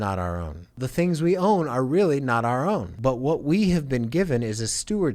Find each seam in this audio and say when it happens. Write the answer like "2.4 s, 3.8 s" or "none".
0.8 s, 2.9 s